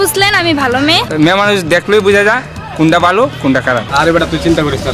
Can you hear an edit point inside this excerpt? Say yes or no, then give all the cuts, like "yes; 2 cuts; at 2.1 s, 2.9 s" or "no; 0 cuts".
yes; 2 cuts; at 1.1 s, 3.9 s